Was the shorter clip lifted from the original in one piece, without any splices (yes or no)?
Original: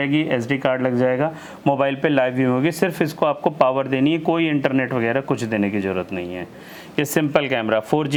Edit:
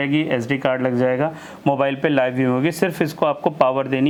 yes